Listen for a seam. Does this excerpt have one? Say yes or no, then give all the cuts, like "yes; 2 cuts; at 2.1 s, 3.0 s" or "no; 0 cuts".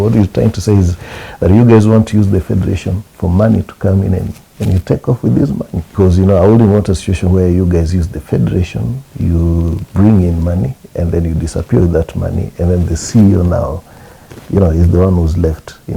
yes; 1 cut; at 5.9 s